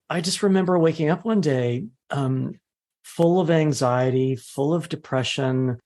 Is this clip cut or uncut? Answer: cut